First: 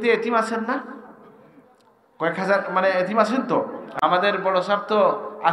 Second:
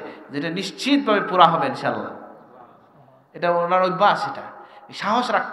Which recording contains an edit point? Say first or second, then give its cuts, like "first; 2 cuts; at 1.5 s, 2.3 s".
first; 1 cut; at 3.8 s